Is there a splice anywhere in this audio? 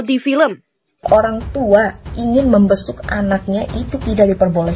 yes; 1 cut; at 1.0 s

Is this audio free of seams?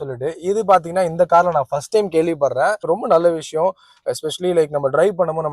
no; 1 cut; at 2.8 s

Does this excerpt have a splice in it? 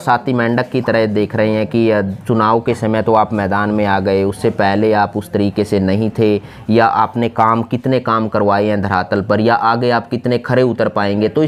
no; 0 cuts

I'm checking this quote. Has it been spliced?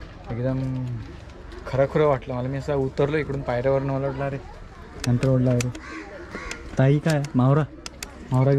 no; 0 cuts

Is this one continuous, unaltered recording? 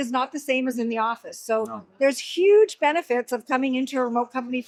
yes; 0 cuts

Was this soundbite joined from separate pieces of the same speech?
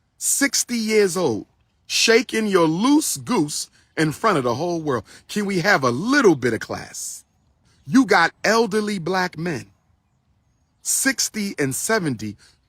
yes; 1 cut; at 7.7 s

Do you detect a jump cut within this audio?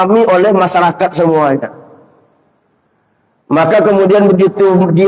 no; 0 cuts

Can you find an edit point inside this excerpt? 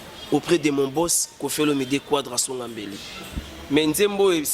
yes; 1 cut; at 3.2 s

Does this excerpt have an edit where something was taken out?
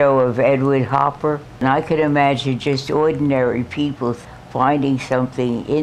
yes; 1 cut; at 1.6 s

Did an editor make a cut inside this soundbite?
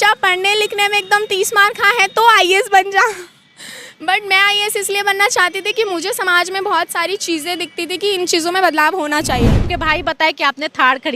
yes; 1 cut; at 9.6 s

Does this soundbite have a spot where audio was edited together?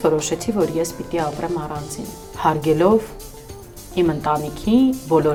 no; 0 cuts

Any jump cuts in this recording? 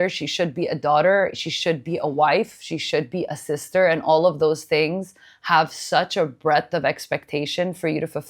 no; 0 cuts

